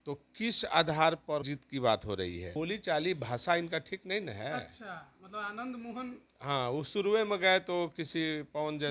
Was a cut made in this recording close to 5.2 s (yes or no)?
no